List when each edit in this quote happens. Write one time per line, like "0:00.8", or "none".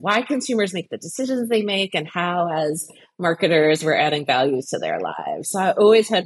none